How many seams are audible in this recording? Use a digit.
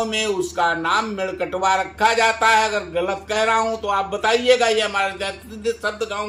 0